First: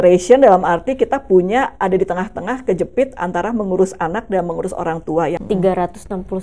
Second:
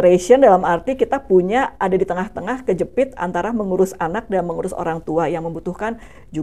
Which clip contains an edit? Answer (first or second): first